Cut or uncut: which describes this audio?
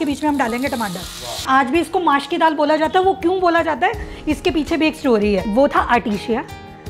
cut